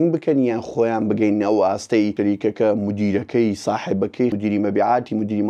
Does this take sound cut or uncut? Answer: cut